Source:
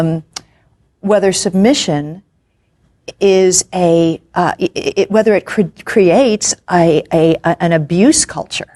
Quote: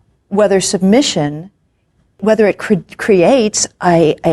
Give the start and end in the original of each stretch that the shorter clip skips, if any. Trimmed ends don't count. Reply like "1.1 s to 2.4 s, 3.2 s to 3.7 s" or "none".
2.9 s to 5.1 s